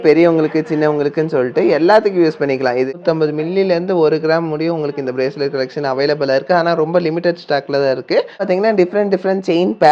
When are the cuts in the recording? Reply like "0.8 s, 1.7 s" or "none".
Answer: 2.9 s, 8.4 s